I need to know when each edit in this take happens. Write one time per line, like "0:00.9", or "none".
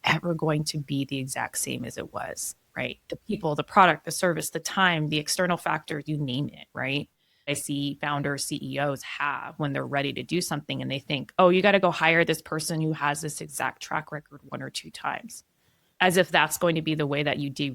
0:07.6
0:11.3